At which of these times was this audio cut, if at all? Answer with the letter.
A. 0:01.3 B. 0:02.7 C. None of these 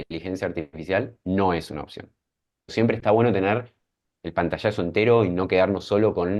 B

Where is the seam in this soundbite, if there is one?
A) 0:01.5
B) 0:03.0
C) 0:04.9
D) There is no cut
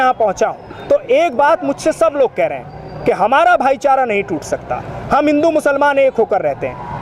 D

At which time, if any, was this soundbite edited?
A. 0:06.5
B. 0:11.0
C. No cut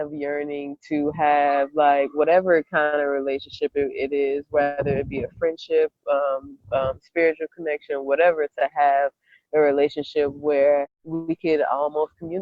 B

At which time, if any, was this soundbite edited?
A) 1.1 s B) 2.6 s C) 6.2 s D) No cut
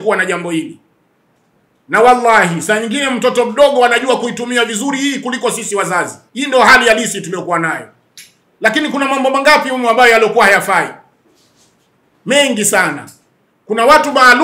C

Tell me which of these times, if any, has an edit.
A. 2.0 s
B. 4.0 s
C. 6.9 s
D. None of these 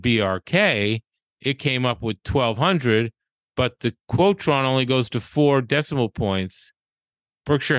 D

